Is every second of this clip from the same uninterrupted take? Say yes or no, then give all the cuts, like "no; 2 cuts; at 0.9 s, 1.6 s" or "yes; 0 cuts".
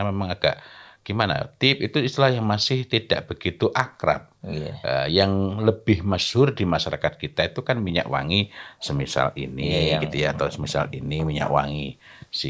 yes; 0 cuts